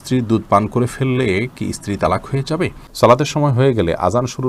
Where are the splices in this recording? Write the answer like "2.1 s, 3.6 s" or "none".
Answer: 2.8 s

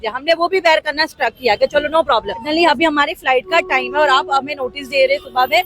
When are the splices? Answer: 2.5 s

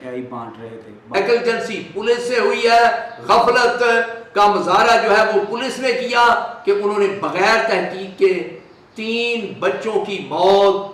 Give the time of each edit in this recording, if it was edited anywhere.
1.1 s

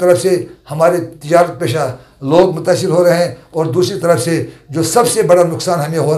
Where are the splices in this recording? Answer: none

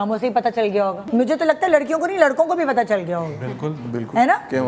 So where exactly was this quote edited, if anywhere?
1.0 s

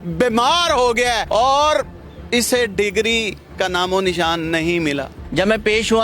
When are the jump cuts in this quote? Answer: 1.2 s, 5.1 s

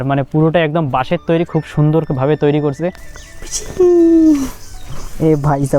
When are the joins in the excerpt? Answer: 3.1 s

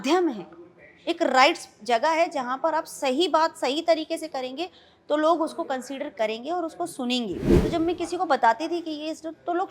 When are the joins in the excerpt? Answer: 7.5 s

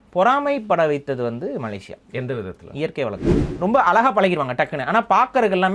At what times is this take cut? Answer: 3.4 s

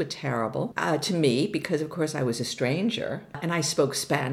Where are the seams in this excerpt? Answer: 3.4 s

